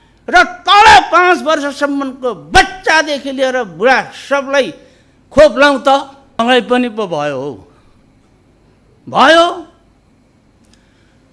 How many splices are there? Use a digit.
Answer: 1